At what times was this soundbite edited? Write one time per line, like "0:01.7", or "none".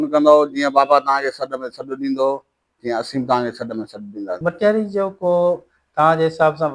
0:04.4